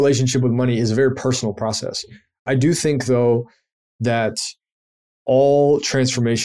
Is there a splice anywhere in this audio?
yes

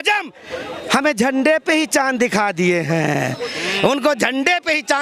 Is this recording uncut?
yes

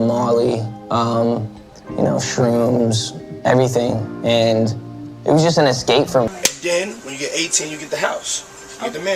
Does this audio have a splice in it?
yes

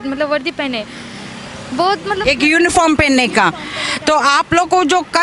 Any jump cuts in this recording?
no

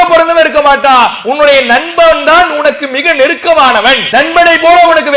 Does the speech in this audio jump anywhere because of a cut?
yes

